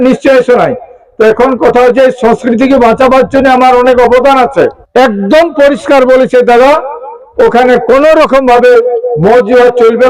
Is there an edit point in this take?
yes; 1 cut; at 4.8 s

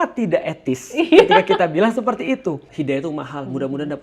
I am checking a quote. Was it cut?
yes; 1 cut; at 2.7 s

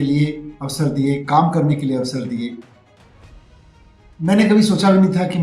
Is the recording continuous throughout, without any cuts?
no; 2 cuts; at 2.9 s, 4.2 s

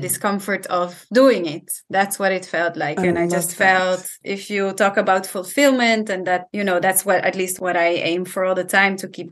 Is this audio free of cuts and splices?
no; 2 cuts; at 4.1 s, 7.5 s

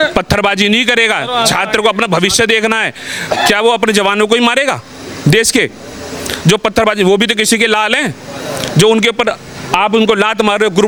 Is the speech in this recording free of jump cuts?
yes; 0 cuts

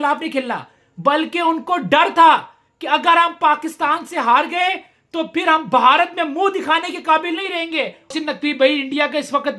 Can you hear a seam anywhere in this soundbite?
yes; 1 cut; at 8.1 s

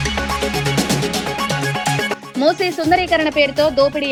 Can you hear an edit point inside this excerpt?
no; 0 cuts

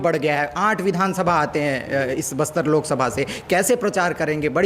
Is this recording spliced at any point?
no; 0 cuts

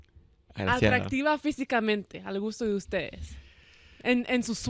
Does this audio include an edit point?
no; 0 cuts

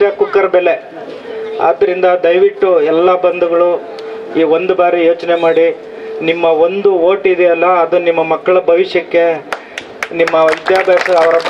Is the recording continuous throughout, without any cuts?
yes; 0 cuts

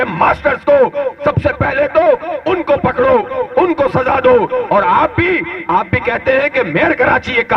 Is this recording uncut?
yes; 0 cuts

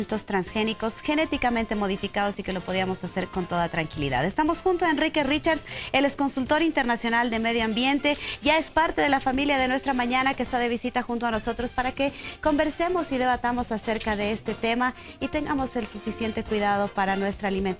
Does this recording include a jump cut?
yes; 1 cut; at 7.3 s

